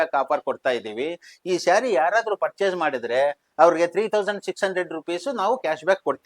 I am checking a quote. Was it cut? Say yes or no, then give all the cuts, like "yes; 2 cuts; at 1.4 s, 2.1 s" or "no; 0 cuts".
no; 0 cuts